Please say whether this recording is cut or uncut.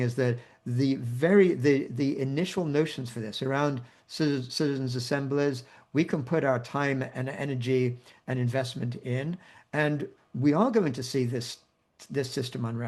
uncut